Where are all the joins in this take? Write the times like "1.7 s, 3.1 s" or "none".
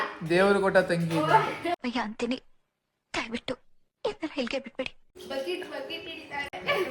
1.5 s, 5.1 s